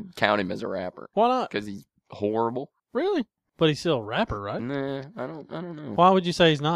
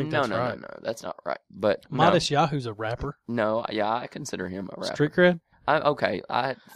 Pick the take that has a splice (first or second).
first